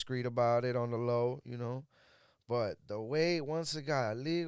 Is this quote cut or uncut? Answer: uncut